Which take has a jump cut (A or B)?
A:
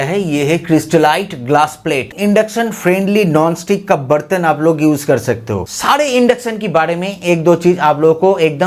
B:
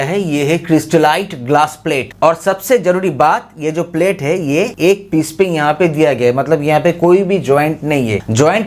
A